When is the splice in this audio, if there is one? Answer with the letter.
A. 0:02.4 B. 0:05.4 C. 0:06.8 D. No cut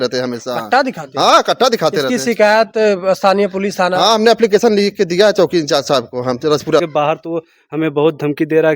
C